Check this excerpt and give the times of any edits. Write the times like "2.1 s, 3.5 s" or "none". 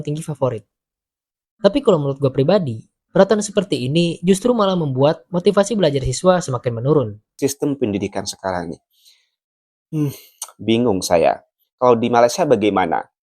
7.2 s